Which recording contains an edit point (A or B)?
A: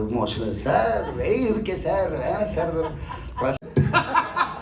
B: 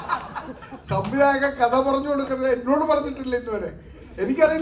A